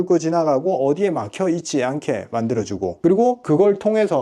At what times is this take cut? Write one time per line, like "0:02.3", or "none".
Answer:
0:03.2